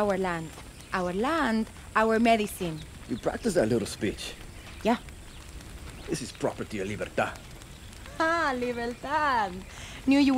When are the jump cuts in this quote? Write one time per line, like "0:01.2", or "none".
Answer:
none